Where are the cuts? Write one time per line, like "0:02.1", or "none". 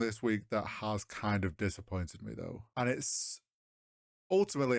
0:02.6